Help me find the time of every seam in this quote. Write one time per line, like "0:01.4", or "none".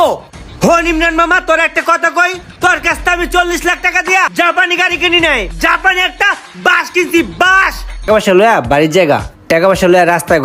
0:05.5
0:08.1